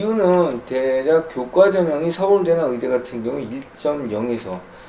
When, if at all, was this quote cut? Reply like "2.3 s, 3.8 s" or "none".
none